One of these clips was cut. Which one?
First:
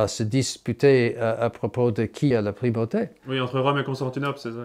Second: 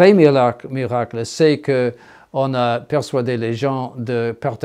first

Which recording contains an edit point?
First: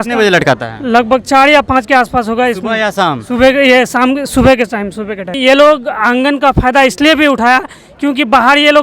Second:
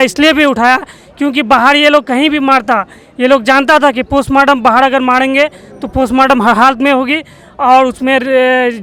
first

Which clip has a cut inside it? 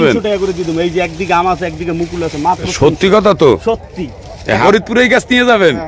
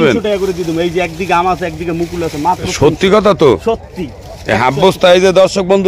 first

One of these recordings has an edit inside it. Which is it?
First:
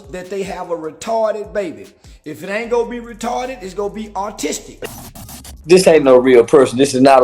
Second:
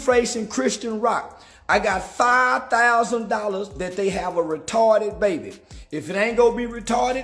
first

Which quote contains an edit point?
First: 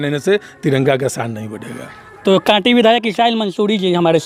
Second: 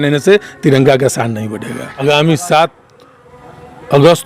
second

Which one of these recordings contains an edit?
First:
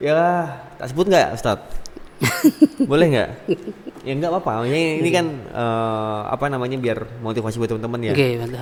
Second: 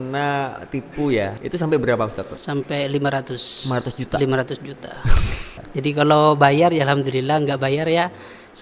second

